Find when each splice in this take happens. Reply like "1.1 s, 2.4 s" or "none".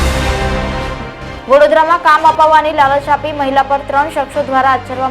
1.4 s

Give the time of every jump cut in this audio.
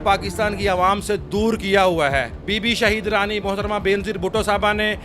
2.4 s

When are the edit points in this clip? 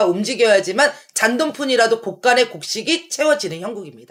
none

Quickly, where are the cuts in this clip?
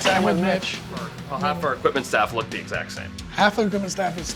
3.1 s

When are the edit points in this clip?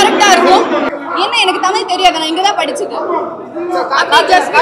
1.0 s

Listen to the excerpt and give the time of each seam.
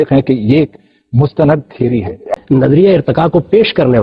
2.3 s

